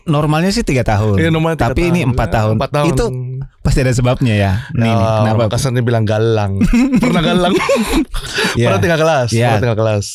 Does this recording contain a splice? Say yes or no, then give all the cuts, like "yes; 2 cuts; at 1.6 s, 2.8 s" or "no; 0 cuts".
no; 0 cuts